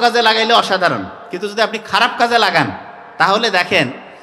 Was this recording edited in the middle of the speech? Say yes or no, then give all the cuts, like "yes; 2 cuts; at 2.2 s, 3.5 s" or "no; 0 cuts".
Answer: no; 0 cuts